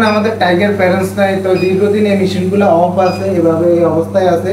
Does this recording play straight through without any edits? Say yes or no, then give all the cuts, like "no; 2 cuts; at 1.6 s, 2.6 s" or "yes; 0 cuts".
yes; 0 cuts